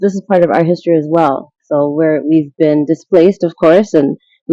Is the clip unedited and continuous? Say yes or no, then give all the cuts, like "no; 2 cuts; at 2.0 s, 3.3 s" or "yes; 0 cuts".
yes; 0 cuts